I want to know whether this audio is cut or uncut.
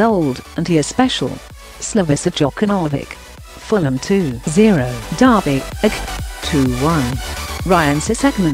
uncut